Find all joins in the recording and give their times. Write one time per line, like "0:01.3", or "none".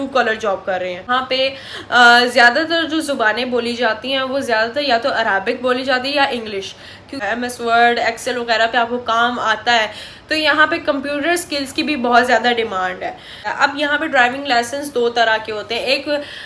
0:01.1
0:07.2
0:13.4